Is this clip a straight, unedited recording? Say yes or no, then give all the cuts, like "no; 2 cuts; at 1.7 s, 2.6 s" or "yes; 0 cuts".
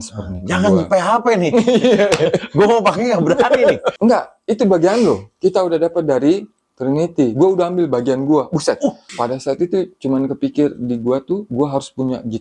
no; 2 cuts; at 3.9 s, 9.0 s